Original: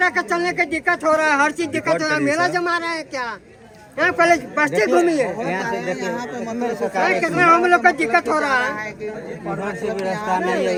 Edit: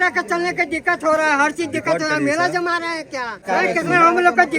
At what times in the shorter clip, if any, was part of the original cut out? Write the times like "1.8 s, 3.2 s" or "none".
3.4 s